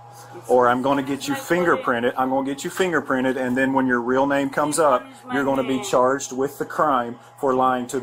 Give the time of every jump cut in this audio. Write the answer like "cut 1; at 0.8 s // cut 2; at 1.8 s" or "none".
none